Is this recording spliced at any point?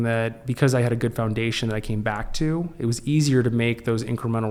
no; 0 cuts

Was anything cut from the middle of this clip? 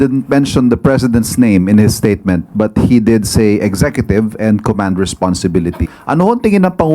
yes; 1 cut; at 5.9 s

